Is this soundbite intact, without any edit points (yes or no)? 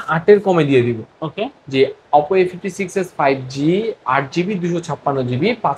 yes